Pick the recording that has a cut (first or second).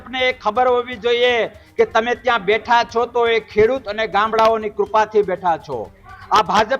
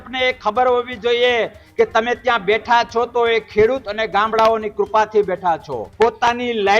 second